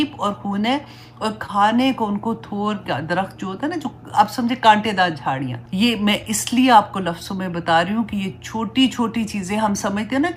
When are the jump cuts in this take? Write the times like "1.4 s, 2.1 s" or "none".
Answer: 5.6 s